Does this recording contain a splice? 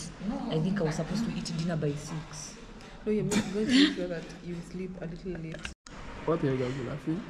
yes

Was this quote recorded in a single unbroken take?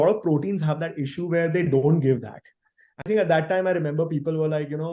no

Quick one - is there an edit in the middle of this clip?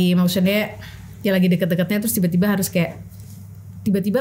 no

